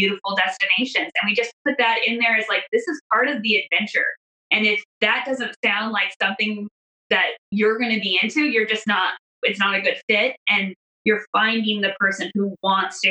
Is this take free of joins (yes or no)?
no